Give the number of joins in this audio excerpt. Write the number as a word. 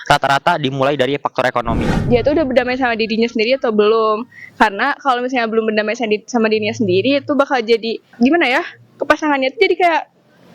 two